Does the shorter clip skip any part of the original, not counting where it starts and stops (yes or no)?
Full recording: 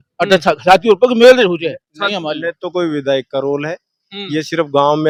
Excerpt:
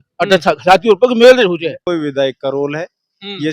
yes